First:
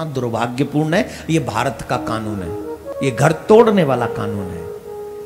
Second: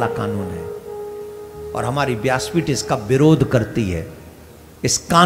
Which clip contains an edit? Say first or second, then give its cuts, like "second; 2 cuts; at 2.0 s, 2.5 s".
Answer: first; 1 cut; at 2.9 s